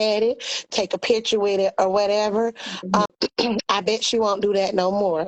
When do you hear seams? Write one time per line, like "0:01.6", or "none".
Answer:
0:03.1